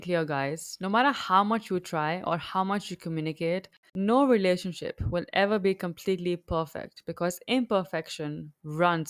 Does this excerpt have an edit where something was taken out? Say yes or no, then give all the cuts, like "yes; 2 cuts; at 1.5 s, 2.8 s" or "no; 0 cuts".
yes; 1 cut; at 3.8 s